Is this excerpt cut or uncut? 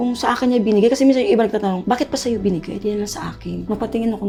uncut